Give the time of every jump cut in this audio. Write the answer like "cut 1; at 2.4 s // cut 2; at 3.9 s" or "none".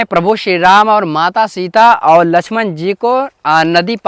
none